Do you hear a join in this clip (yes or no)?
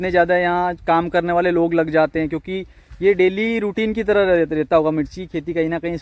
no